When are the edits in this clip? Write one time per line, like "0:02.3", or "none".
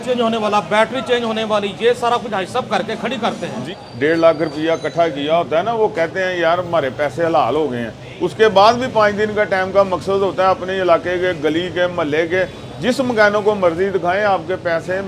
0:03.7